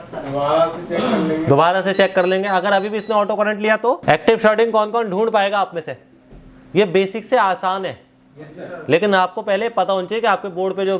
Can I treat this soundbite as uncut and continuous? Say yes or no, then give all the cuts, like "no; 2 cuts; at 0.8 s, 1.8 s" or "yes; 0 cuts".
no; 1 cut; at 4.0 s